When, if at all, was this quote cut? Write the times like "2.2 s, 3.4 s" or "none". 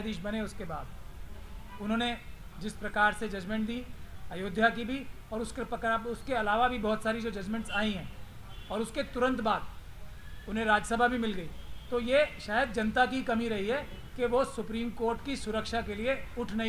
none